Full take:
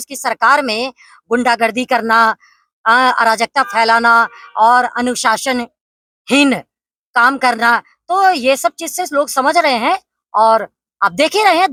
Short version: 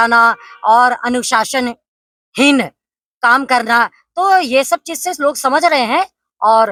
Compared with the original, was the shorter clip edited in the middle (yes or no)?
no